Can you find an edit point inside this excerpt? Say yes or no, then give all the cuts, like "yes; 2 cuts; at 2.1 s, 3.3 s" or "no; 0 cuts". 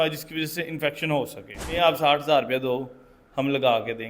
yes; 1 cut; at 1.8 s